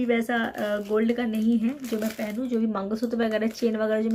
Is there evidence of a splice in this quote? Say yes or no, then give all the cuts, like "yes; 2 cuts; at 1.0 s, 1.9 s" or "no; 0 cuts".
no; 0 cuts